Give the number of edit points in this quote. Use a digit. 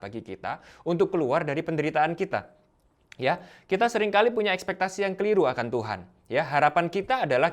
0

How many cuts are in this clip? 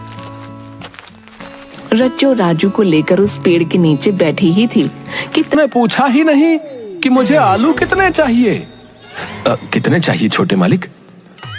1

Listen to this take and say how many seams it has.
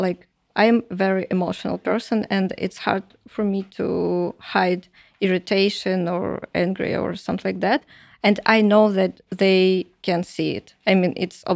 0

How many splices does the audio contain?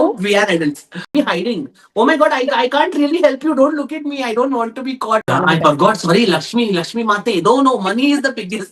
2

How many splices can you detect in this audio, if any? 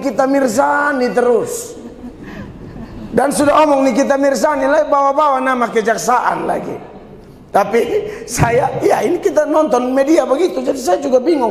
0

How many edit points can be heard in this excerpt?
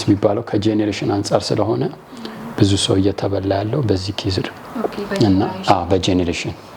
0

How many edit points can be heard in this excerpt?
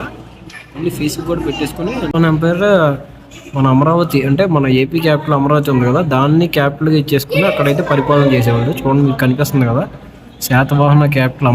1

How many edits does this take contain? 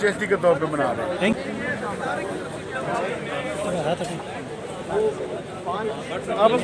1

